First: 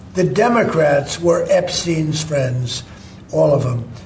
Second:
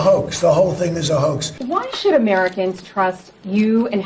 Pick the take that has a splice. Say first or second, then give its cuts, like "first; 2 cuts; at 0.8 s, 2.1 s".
second; 1 cut; at 1.5 s